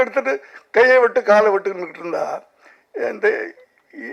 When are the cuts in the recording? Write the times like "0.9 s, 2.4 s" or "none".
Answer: none